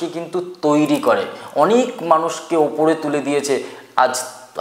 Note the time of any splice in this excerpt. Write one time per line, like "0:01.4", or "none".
none